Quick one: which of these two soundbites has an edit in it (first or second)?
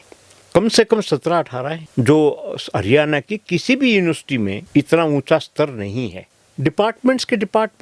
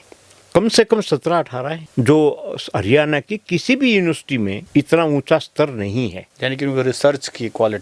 first